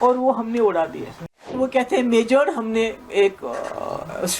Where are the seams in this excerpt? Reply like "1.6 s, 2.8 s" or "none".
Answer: 1.5 s